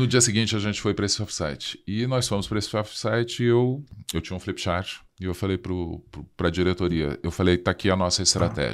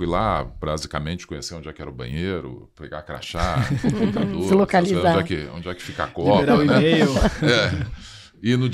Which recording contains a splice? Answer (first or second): first